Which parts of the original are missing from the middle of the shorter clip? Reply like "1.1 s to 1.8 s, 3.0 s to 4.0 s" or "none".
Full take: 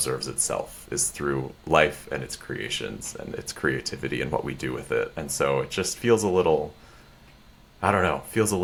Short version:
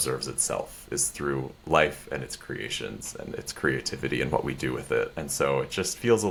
none